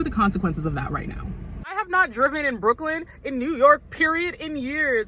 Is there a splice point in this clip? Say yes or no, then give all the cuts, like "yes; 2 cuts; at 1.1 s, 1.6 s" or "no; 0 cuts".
yes; 1 cut; at 1.8 s